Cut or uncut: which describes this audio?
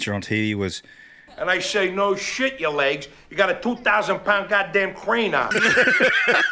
uncut